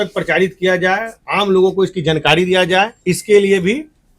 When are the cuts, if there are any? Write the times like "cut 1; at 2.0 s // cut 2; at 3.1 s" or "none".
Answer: cut 1; at 3.0 s